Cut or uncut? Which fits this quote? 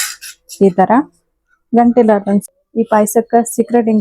cut